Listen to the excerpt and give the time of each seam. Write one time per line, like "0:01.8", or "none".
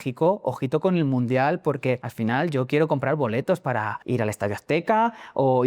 0:02.1
0:04.0

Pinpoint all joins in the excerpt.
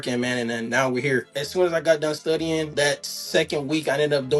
0:01.4
0:02.7

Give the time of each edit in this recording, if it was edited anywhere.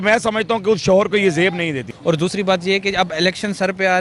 0:01.9

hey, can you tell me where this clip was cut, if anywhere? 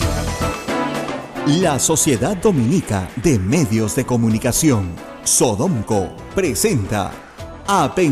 0:01.3

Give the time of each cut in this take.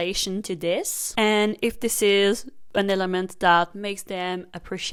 none

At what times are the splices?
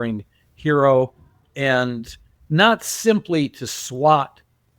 0:02.4

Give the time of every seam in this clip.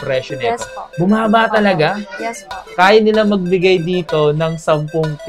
0:02.7

